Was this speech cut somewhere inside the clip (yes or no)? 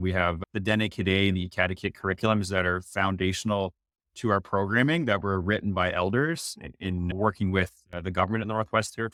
no